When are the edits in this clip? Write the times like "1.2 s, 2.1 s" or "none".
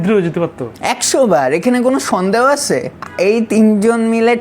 3.0 s